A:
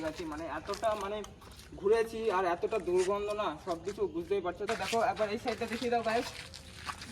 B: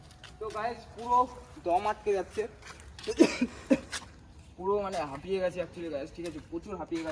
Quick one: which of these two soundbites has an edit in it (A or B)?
A